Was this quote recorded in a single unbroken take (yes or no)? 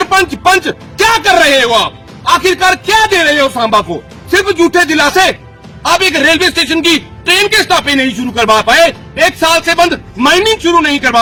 yes